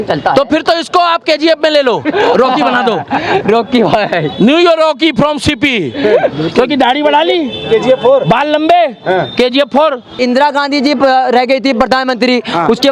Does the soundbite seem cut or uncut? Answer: cut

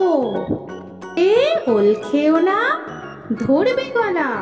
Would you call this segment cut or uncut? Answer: cut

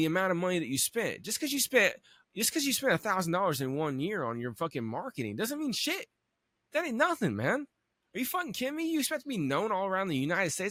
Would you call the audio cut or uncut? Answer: uncut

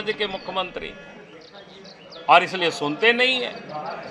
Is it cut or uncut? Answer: uncut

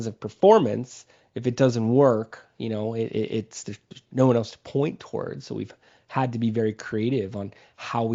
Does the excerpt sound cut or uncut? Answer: uncut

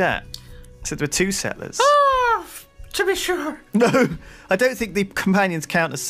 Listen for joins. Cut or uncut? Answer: cut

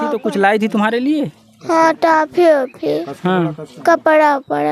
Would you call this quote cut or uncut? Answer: uncut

